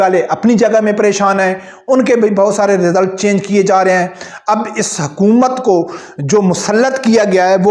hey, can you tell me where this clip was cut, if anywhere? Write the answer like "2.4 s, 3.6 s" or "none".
none